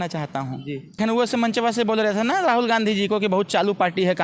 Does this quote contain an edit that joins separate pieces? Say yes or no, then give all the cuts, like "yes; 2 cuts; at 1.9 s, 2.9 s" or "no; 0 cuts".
yes; 1 cut; at 1.0 s